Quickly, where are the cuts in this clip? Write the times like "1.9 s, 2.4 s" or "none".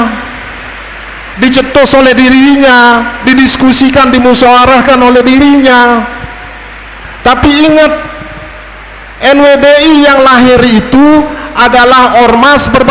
none